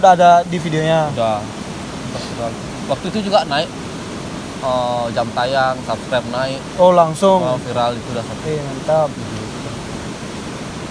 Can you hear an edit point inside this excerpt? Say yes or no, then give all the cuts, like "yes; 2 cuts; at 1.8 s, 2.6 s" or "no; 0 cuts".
no; 0 cuts